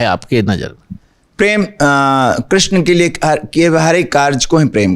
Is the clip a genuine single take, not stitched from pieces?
yes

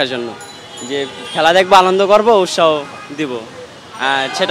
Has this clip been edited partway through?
no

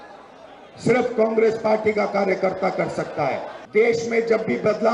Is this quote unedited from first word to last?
no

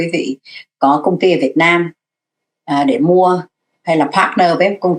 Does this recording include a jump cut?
no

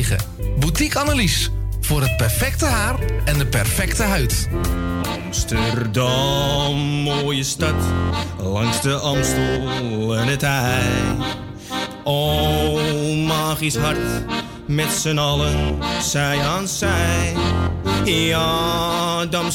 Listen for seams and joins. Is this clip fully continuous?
no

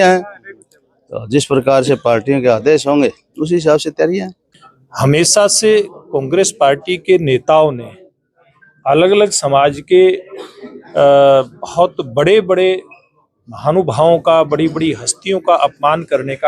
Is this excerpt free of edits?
no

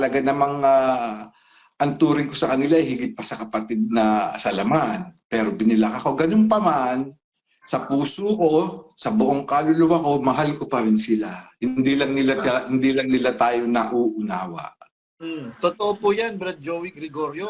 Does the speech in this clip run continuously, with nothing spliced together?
yes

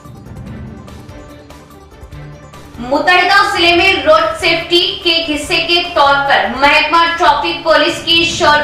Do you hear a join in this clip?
yes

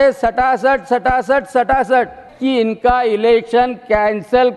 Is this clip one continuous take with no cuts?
no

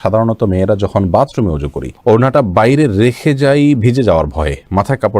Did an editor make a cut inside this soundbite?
no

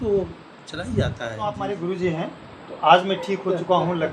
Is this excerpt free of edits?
no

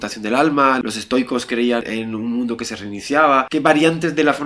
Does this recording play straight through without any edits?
no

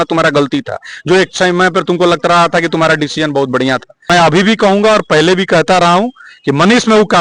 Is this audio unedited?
no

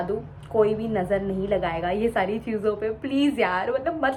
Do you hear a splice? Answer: no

